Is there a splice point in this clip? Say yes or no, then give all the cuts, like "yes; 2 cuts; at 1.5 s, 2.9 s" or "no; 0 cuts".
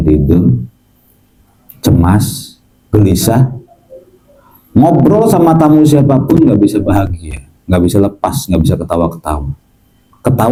no; 0 cuts